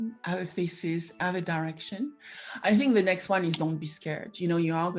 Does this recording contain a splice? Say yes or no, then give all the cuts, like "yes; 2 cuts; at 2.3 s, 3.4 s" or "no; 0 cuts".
no; 0 cuts